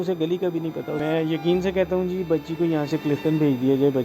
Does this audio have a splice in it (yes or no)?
yes